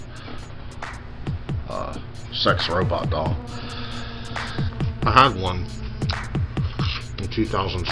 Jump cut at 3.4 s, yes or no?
no